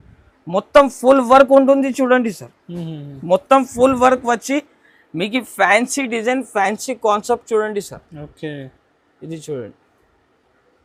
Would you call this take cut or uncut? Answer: uncut